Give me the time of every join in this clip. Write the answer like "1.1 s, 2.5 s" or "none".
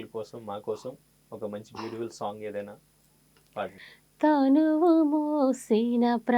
3.9 s